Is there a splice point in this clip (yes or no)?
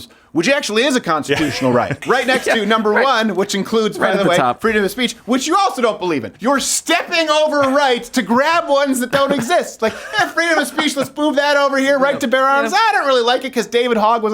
yes